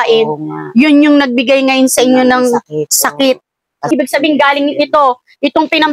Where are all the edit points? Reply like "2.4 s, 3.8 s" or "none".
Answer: 3.8 s